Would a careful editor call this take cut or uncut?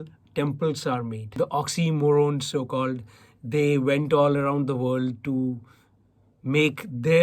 cut